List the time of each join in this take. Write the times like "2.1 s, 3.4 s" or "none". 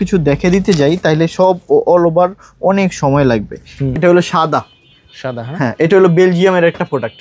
3.9 s